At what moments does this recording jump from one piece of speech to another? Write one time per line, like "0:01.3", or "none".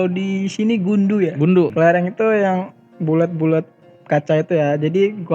0:01.7